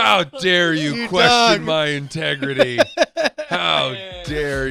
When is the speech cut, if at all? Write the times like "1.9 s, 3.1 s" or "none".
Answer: none